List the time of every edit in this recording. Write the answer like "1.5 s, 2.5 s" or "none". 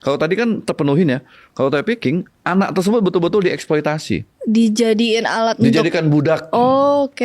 4.3 s